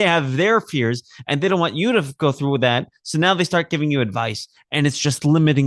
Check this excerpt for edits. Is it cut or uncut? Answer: uncut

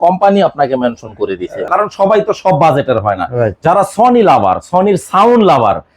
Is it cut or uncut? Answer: cut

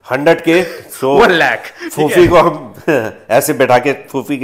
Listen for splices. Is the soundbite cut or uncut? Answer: uncut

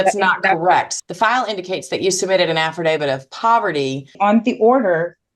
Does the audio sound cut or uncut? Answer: cut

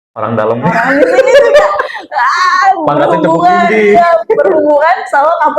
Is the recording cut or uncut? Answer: uncut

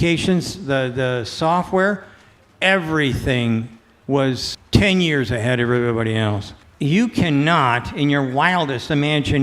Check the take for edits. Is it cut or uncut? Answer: cut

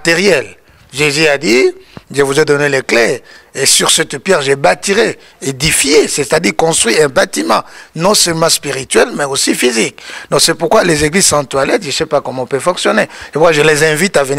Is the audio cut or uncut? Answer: uncut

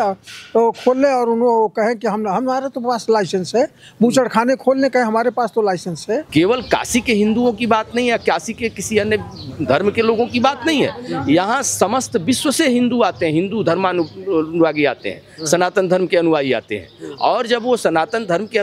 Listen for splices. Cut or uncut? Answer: cut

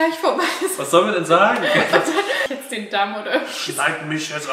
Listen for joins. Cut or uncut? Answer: cut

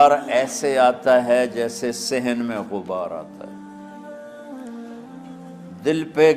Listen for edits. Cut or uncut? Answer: cut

